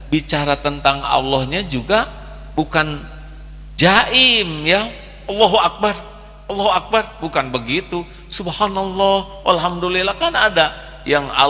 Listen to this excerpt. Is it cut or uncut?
uncut